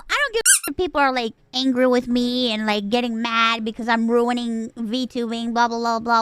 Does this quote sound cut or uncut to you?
cut